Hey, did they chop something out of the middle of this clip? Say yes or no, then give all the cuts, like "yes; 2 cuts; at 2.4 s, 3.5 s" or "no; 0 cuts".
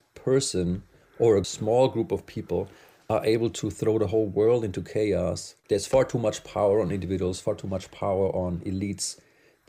yes; 3 cuts; at 1.5 s, 5.6 s, 7.4 s